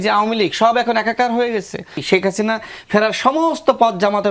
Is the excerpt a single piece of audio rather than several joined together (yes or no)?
no